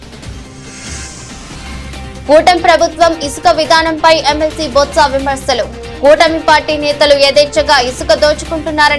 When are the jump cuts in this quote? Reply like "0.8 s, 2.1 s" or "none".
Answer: 2.2 s